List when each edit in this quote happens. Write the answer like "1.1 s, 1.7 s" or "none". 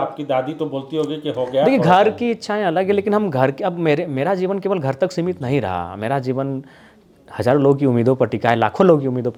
none